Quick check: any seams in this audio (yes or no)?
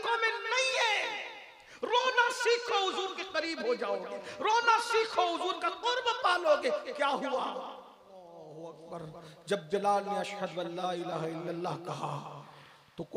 yes